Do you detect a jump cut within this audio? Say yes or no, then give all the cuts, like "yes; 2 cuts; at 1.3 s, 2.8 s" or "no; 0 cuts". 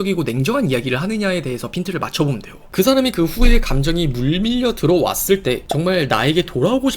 yes; 1 cut; at 2.5 s